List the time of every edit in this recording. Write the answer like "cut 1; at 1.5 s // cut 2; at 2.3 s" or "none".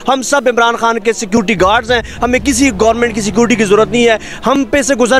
none